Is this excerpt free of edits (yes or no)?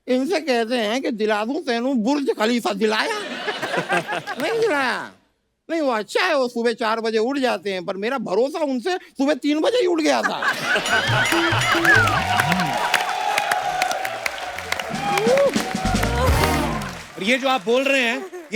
yes